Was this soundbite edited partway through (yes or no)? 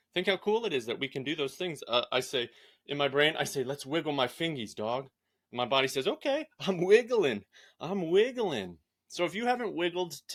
no